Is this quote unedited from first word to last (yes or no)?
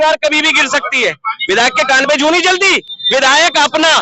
yes